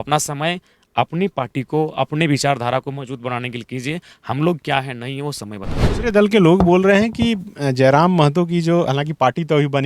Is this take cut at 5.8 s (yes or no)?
yes